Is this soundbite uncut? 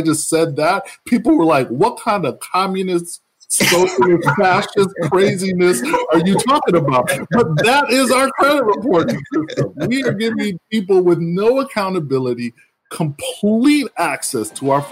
no; 1 cut; at 7.2 s

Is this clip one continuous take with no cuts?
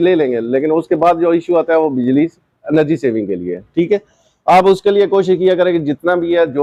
yes; 0 cuts

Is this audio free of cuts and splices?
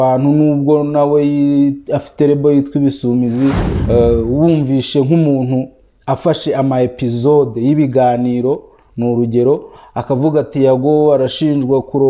no; 1 cut; at 3.7 s

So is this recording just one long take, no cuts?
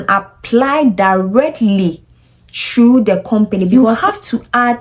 no; 1 cut; at 3.7 s

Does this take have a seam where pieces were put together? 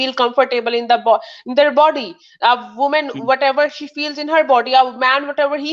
no; 0 cuts

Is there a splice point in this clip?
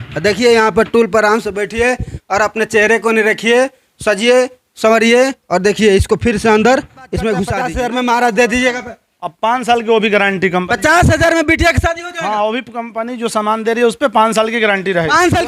yes; 1 cut; at 7.6 s

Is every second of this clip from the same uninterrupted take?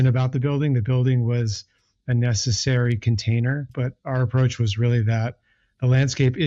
no; 1 cut; at 3.7 s

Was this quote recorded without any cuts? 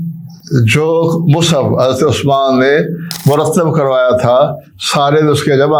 yes; 0 cuts

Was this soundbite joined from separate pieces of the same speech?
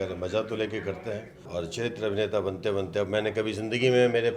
yes; 1 cut; at 1.3 s

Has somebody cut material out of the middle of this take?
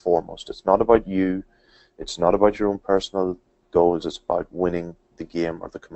no; 0 cuts

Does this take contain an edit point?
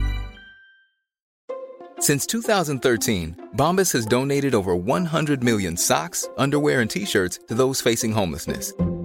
yes; 1 cut; at 1.3 s

